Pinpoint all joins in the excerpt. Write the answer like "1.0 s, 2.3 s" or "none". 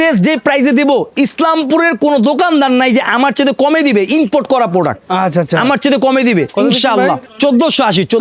none